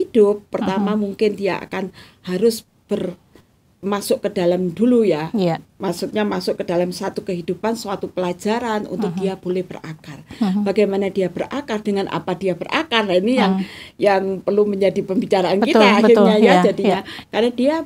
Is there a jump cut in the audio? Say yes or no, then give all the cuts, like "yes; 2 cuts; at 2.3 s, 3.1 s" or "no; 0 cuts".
no; 0 cuts